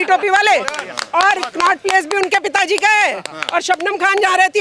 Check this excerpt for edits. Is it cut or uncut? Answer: uncut